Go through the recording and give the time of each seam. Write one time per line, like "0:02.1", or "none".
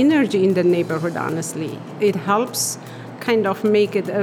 none